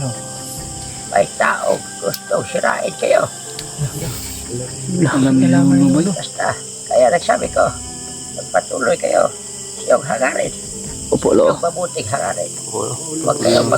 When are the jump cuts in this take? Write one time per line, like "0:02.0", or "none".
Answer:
0:06.3